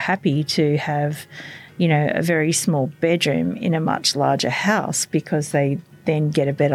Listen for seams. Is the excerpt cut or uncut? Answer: uncut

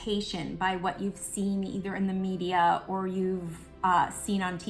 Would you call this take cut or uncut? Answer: uncut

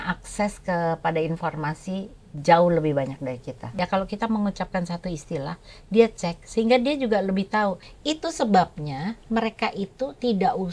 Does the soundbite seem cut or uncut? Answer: cut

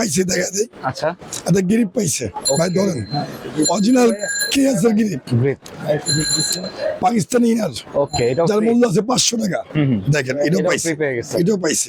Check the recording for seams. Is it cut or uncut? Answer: uncut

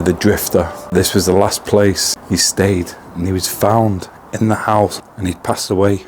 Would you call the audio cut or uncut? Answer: cut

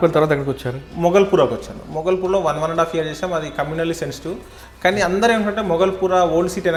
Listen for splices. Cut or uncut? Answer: uncut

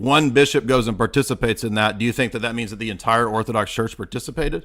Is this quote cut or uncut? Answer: uncut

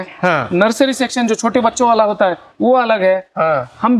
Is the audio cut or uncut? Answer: uncut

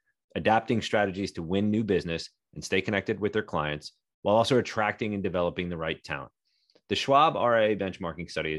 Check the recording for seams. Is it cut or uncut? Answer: uncut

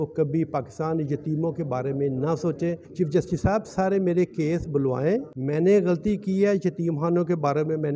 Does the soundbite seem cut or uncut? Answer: cut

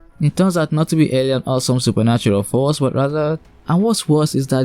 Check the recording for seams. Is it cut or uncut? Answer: cut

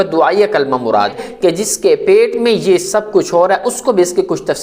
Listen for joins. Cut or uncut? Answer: cut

